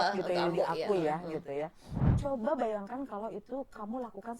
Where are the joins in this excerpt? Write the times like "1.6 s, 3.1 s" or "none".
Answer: 2.0 s